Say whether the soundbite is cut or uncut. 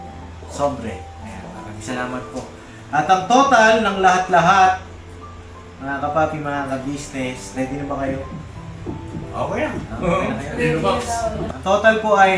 cut